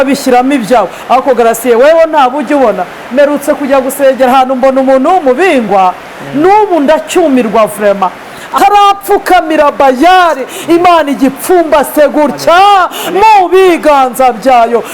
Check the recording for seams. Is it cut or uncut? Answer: cut